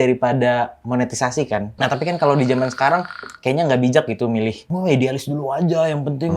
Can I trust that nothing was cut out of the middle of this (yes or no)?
no